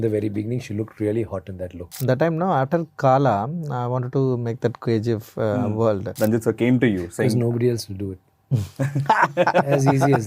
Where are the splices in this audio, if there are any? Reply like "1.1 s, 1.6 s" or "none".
1.8 s, 6.1 s